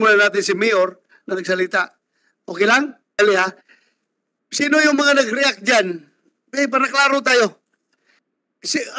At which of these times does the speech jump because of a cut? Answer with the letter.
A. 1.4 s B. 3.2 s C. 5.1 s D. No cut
B